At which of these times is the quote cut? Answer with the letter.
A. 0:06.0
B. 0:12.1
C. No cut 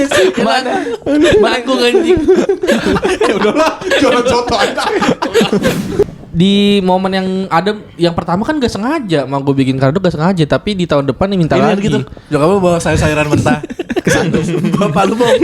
A